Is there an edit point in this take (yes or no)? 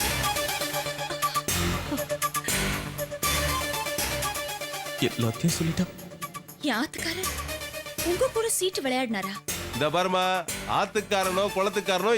no